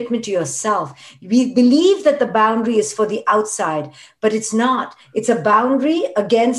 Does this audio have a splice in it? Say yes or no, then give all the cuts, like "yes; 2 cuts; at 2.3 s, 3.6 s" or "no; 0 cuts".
no; 0 cuts